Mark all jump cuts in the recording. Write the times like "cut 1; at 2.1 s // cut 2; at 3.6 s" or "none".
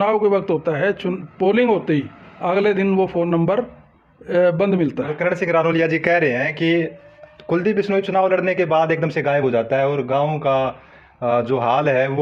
none